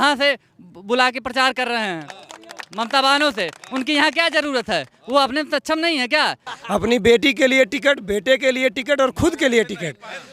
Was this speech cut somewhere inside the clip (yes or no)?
yes